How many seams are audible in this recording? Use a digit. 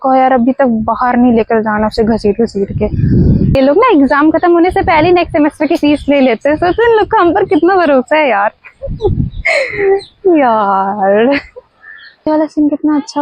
2